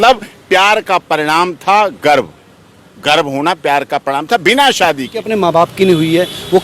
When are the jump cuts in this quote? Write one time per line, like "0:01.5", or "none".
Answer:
0:05.2